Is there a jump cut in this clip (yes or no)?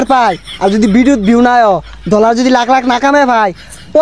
no